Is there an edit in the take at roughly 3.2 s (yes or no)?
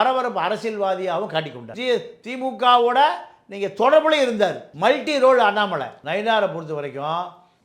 no